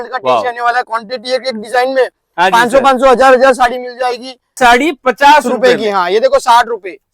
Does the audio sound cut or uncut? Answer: cut